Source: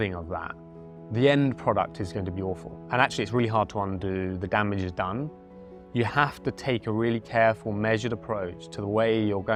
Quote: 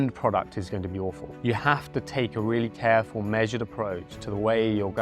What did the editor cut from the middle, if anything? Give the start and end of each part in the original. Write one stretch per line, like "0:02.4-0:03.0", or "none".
0:02.7-0:05.8